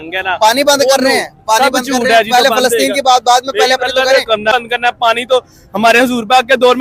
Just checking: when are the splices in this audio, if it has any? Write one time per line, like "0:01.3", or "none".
0:04.5